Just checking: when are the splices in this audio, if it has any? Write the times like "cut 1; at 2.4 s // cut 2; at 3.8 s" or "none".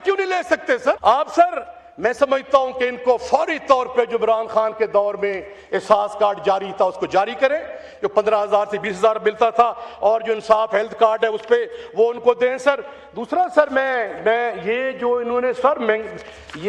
cut 1; at 1.0 s

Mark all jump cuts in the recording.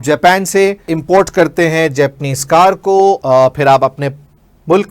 cut 1; at 0.9 s // cut 2; at 3.2 s

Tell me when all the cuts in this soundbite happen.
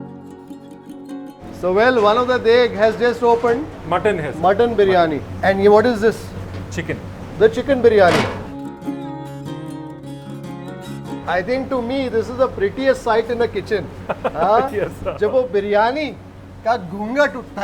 none

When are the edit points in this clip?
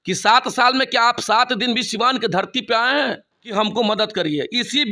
cut 1; at 3.5 s

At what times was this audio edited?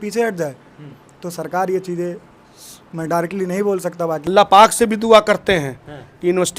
cut 1; at 4.2 s

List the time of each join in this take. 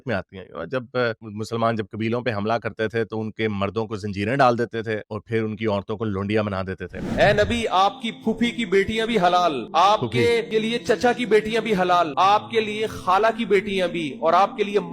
cut 1; at 7.1 s

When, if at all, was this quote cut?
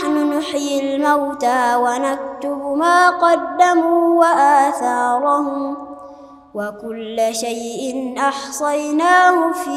none

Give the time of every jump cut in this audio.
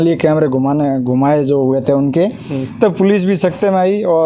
none

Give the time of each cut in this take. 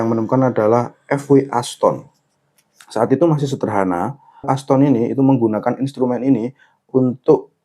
cut 1; at 4.4 s

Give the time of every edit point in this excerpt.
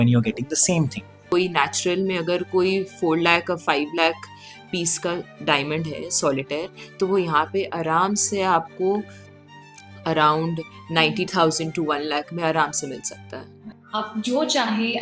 cut 1; at 1.3 s // cut 2; at 13.5 s

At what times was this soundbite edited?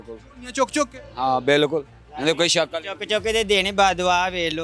none

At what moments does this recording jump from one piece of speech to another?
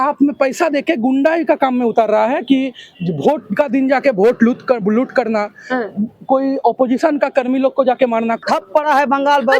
cut 1; at 8.4 s

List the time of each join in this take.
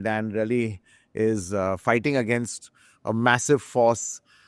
none

